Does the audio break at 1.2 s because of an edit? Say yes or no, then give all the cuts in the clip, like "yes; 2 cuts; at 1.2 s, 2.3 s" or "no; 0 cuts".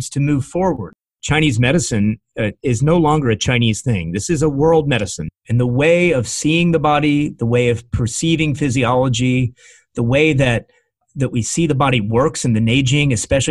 yes; 1 cut; at 1.2 s